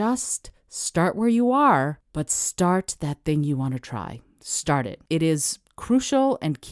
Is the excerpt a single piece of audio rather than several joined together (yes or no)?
no